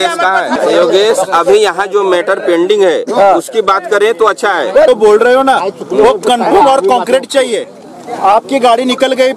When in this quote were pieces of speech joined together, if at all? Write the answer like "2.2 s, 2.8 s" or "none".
none